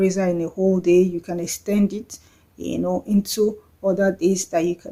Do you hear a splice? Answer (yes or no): no